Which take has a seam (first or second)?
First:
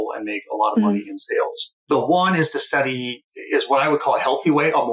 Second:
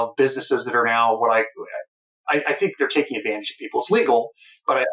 first